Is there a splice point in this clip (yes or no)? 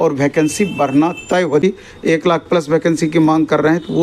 yes